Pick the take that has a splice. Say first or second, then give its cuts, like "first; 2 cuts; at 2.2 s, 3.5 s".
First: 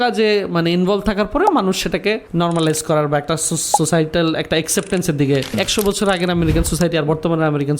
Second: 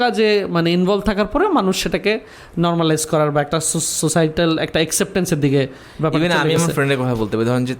first; 2 cuts; at 2.2 s, 5.6 s